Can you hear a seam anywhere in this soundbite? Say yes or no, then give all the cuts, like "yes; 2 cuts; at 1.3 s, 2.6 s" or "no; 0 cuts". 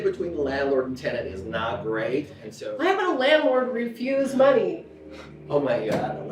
yes; 1 cut; at 2.4 s